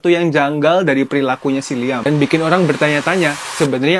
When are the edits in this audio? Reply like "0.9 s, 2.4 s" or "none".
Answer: 2.1 s